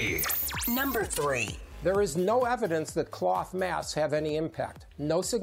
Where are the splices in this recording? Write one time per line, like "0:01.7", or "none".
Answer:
0:01.6